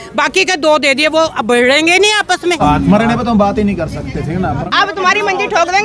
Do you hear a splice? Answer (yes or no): yes